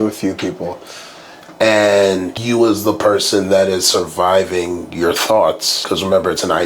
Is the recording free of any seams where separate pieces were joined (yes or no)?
no